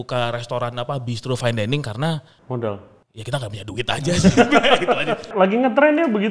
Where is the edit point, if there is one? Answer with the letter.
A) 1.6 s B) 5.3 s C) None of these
B